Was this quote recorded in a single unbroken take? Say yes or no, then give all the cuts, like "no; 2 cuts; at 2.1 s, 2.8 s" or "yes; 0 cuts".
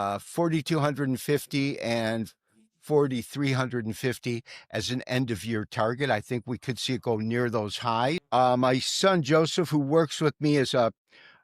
no; 1 cut; at 8.2 s